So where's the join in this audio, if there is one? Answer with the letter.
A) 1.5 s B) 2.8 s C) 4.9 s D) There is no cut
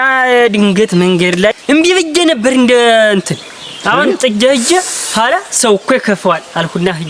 A